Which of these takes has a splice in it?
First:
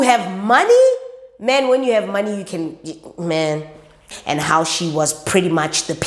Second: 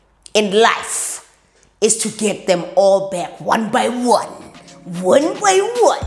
first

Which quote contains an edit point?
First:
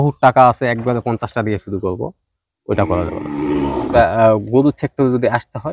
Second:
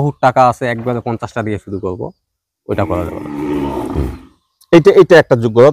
first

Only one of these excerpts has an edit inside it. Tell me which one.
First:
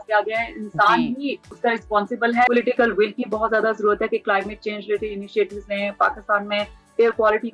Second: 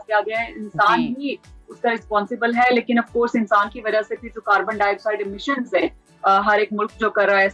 first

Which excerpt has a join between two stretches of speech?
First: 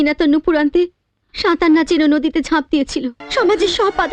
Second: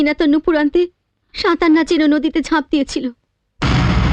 first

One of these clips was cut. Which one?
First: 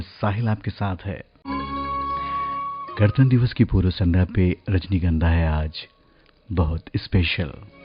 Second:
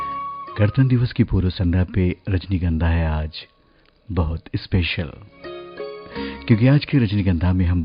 first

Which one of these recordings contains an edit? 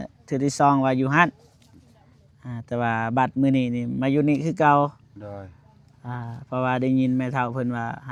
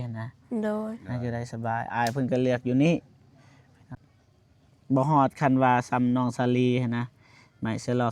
second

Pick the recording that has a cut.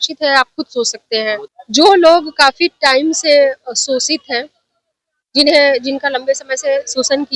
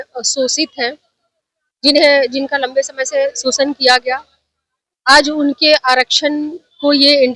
first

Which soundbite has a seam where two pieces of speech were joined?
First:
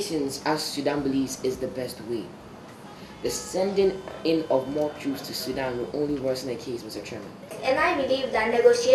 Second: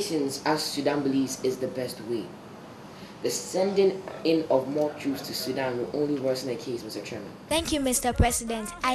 second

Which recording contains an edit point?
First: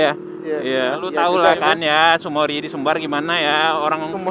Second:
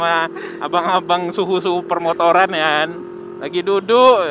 first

